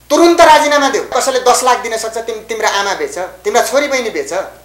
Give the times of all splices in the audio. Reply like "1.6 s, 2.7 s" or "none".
1.1 s